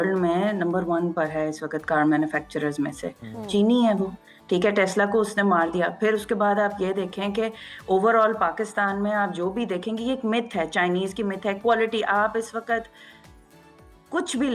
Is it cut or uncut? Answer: uncut